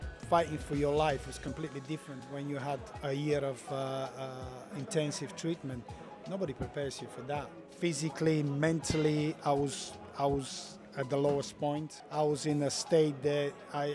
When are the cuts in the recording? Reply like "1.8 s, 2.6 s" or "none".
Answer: 2.2 s, 7.6 s, 12.0 s